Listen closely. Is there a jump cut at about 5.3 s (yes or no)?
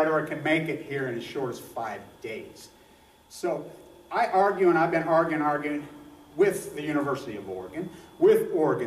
yes